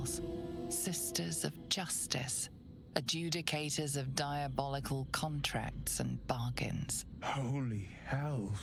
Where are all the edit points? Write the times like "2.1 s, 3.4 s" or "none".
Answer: none